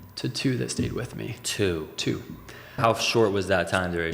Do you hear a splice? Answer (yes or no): yes